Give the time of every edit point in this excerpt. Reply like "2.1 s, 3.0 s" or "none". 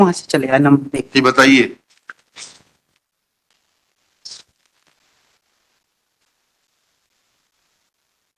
none

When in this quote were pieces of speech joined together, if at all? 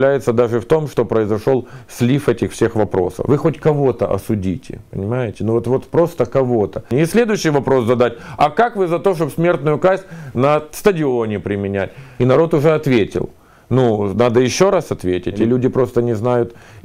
3.2 s, 6.9 s, 12.1 s, 15.4 s

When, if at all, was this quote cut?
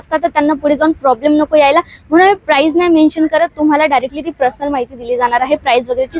none

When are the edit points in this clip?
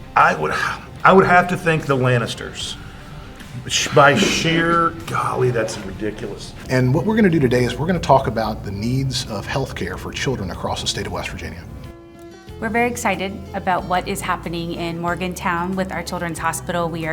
6.5 s

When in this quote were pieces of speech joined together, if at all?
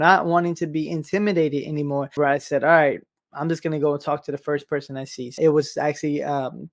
2.2 s, 5.3 s

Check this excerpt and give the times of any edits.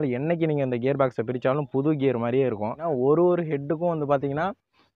2.8 s

